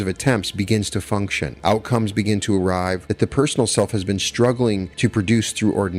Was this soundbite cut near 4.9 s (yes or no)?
yes